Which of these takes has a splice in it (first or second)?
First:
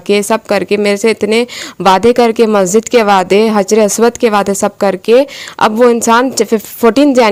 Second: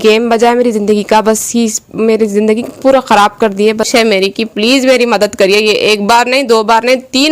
second